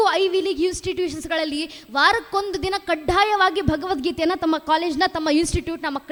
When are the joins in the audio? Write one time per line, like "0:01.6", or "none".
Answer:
none